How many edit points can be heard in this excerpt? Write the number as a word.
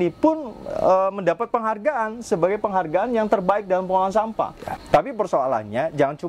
one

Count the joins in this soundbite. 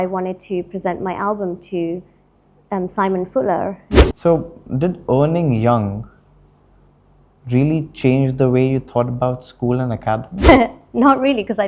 two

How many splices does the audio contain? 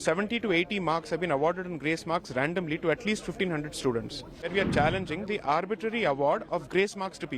one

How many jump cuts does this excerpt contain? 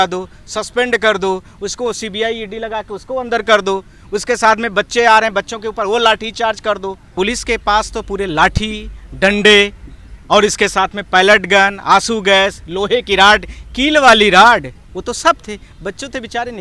one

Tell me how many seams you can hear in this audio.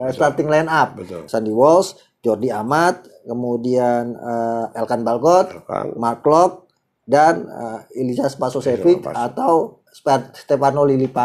one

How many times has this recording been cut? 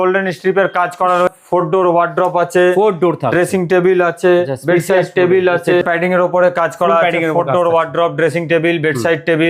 two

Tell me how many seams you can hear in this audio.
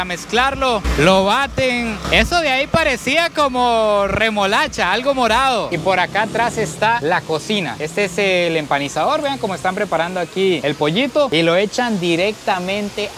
one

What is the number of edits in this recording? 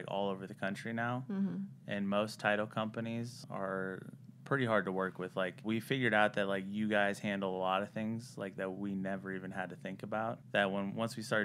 three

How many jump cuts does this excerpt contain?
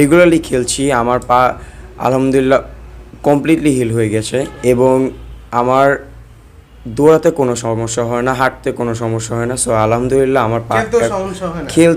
one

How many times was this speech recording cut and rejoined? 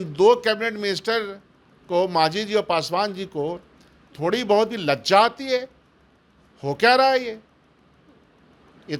zero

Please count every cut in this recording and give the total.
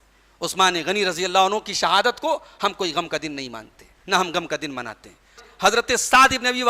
one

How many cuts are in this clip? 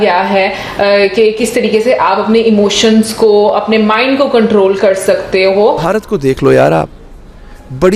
one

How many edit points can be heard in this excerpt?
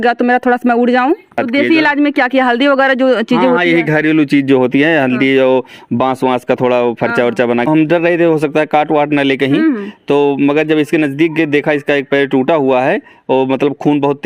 two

